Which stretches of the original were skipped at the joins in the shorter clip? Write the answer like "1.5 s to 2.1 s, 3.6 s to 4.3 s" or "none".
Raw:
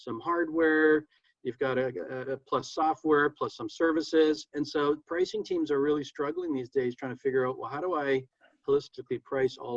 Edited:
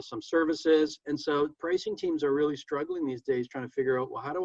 none